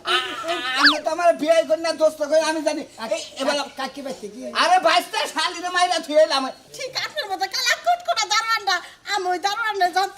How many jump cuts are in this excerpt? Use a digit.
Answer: 1